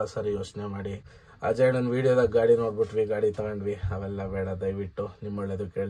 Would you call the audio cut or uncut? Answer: uncut